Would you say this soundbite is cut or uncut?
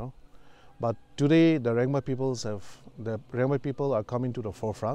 uncut